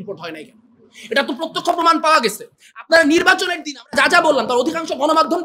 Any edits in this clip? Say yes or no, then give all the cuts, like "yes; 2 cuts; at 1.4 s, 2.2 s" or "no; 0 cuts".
no; 0 cuts